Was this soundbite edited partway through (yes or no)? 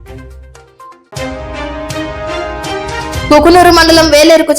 yes